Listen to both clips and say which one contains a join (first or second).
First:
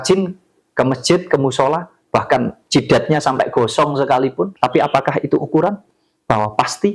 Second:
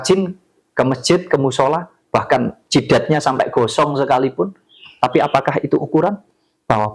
first